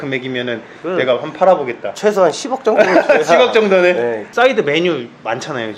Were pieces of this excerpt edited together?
yes; 1 cut; at 4.2 s

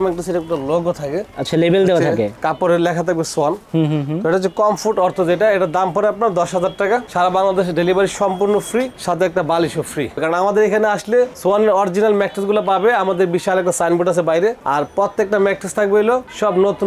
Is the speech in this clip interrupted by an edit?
yes; 1 cut; at 10.2 s

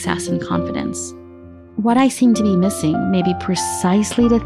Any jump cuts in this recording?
yes; 1 cut; at 1.0 s

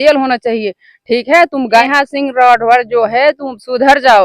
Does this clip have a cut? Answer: yes; 1 cut; at 1.8 s

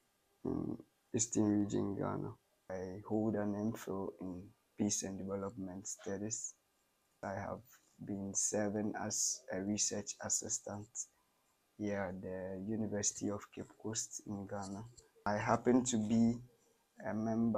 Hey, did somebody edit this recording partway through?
yes; 3 cuts; at 2.7 s, 7.2 s, 15.3 s

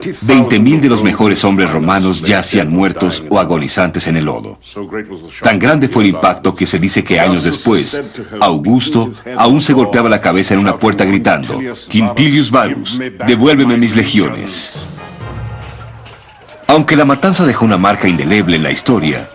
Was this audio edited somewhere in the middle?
yes; 1 cut; at 13.0 s

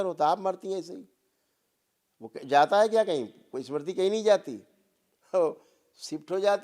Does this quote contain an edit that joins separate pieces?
no; 0 cuts

